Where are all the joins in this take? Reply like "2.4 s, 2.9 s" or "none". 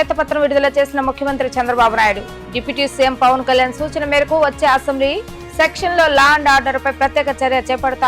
none